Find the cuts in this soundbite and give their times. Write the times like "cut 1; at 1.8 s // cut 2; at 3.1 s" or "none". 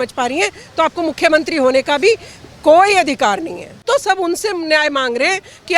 cut 1; at 3.8 s